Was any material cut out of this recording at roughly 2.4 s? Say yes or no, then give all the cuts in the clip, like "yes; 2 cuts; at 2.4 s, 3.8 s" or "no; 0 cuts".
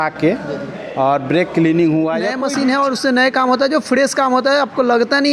yes; 1 cut; at 2.4 s